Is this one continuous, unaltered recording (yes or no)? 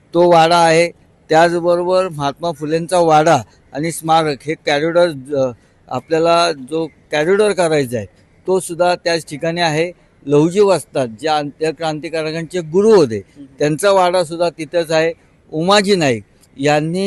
yes